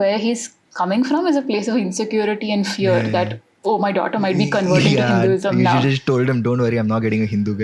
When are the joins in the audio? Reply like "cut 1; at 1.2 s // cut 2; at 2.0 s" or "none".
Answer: none